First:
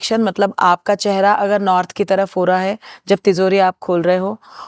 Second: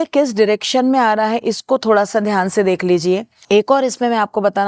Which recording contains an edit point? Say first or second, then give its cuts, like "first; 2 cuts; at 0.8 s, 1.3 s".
second; 1 cut; at 3.3 s